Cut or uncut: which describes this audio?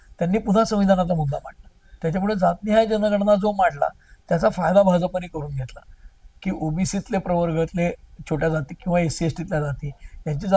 uncut